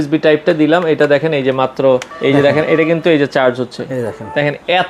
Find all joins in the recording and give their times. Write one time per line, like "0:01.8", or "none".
0:02.1